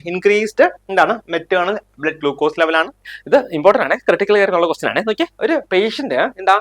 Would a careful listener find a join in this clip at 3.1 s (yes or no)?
yes